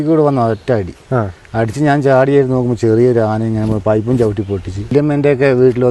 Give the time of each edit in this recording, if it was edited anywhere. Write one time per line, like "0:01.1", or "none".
0:04.9

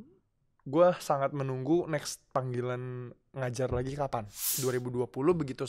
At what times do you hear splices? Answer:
0:04.5

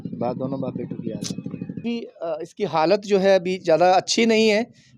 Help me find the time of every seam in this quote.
0:01.8

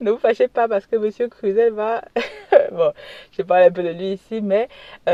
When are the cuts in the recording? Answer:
none

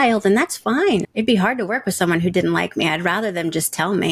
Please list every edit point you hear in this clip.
0:01.0

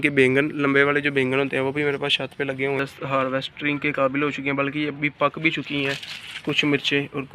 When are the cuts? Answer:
0:02.6

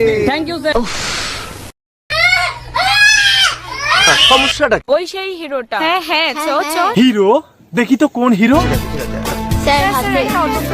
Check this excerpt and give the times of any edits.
0:04.1

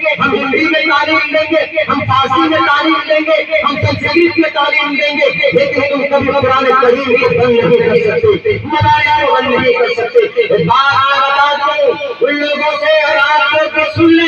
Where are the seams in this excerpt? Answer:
none

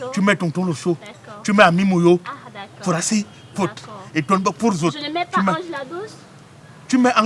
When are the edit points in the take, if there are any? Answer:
none

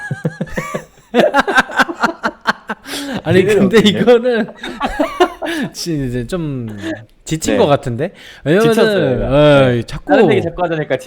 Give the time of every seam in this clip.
none

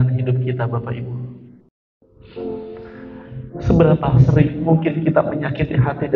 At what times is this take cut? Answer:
0:02.3

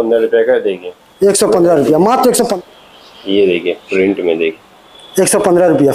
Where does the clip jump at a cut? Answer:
0:02.5

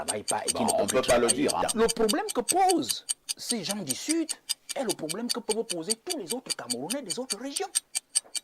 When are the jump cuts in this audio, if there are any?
0:01.6

